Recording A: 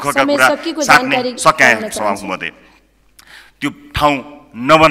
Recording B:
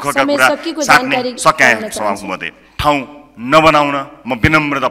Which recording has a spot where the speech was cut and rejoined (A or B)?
B